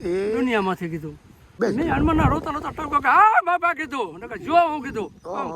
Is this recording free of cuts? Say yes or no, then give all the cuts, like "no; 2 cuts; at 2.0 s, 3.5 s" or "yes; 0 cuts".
no; 1 cut; at 1.6 s